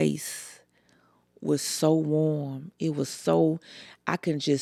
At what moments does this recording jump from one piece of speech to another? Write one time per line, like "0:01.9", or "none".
none